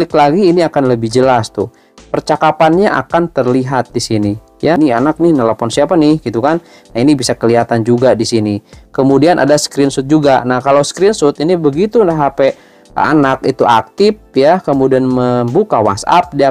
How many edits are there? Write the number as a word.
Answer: two